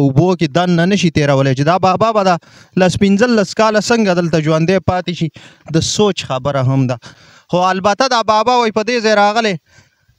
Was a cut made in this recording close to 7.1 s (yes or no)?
yes